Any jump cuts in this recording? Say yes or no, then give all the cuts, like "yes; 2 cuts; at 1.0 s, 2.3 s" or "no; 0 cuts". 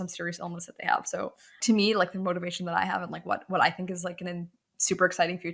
yes; 1 cut; at 1.5 s